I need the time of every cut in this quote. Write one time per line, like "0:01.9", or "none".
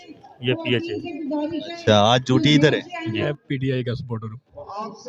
0:03.1